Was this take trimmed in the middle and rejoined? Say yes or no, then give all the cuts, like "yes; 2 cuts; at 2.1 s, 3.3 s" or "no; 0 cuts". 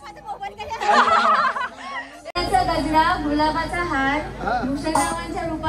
yes; 1 cut; at 2.3 s